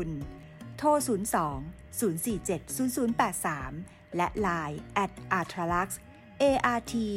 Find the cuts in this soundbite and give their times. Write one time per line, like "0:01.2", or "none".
none